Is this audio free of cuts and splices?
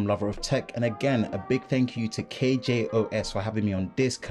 yes; 0 cuts

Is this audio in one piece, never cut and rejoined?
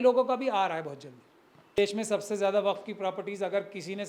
no; 1 cut; at 1.8 s

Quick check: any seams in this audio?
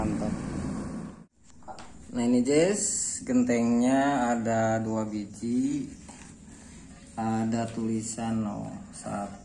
yes; 1 cut; at 1.1 s

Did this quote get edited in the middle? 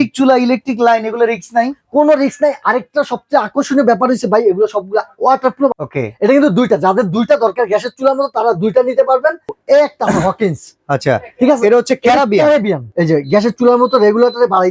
yes; 3 cuts; at 5.7 s, 9.5 s, 12.9 s

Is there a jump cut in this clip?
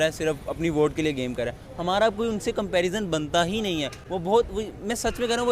no; 0 cuts

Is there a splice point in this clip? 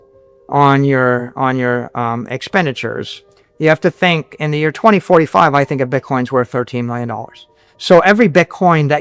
no; 0 cuts

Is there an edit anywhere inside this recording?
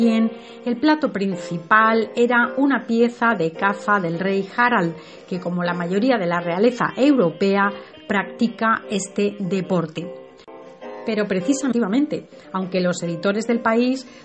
no; 0 cuts

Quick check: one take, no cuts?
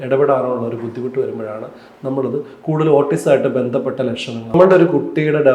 no; 1 cut; at 4.5 s

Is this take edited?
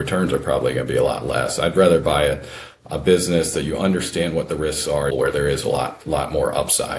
yes; 1 cut; at 5.1 s

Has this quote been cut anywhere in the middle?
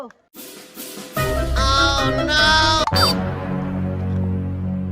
yes; 1 cut; at 2.8 s

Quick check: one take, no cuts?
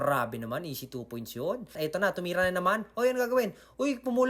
no; 1 cut; at 1.8 s

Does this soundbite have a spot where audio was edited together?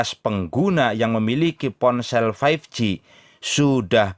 no; 0 cuts

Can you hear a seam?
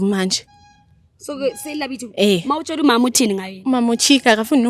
no; 0 cuts

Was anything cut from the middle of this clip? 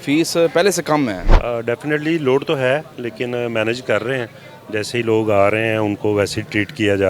yes; 1 cut; at 1.3 s

